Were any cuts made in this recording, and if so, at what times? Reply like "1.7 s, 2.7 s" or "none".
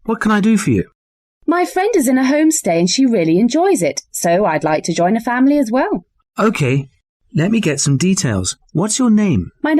2.9 s